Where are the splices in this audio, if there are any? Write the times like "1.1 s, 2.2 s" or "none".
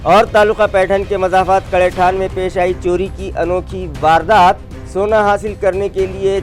none